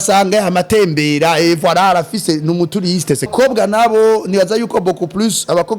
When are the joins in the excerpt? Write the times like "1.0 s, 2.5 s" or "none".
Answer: 3.3 s